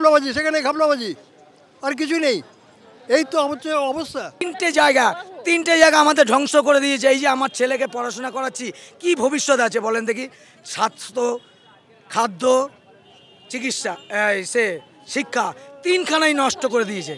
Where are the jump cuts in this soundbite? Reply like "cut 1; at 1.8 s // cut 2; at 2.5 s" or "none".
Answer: cut 1; at 4.2 s